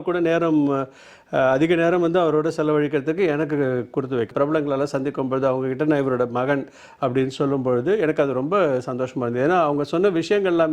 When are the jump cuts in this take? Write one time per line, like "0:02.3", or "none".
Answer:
0:04.3